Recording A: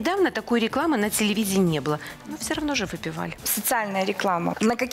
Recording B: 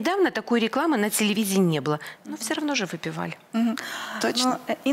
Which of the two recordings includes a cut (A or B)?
A